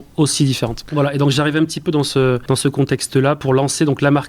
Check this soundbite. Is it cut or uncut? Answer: cut